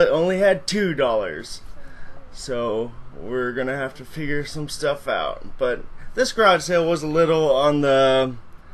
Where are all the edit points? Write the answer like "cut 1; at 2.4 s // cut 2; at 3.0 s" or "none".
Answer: cut 1; at 7.1 s